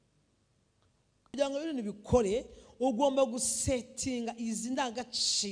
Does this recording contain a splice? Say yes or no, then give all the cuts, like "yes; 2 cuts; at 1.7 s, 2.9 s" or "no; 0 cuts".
yes; 1 cut; at 1.3 s